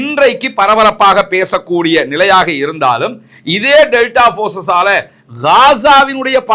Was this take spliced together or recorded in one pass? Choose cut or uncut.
uncut